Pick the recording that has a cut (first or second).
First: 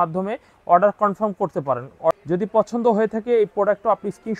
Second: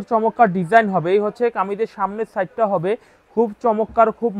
first